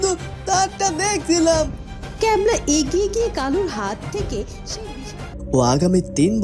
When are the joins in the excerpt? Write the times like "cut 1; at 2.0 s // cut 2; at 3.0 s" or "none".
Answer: cut 1; at 5.2 s